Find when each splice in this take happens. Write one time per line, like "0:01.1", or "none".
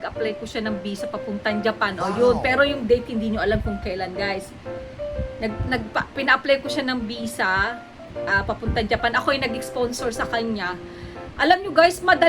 none